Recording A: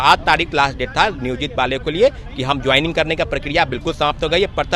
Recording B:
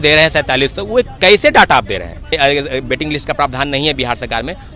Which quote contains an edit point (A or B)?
B